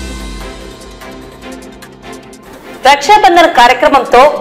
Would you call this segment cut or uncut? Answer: cut